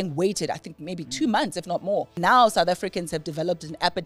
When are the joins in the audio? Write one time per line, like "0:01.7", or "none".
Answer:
0:02.1